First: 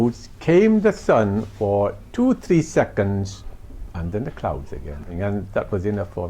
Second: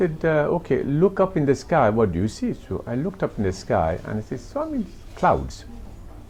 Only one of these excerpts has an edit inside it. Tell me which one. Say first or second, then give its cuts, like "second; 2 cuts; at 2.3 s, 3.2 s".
first; 1 cut; at 5.1 s